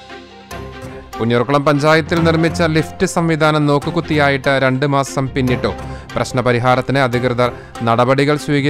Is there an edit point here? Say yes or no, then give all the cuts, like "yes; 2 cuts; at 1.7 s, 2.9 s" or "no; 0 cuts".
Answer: yes; 1 cut; at 1.2 s